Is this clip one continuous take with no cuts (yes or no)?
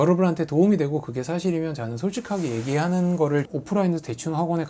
no